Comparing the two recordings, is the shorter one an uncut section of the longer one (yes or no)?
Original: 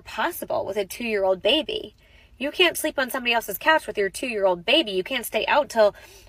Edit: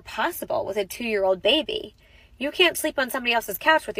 yes